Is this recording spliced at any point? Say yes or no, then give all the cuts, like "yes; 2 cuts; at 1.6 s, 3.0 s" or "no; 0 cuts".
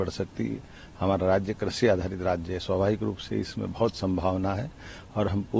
no; 0 cuts